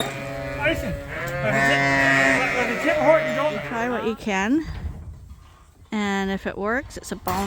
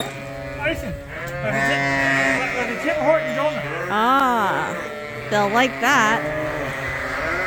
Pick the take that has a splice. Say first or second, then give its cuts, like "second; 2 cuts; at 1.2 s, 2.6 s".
first; 1 cut; at 3.7 s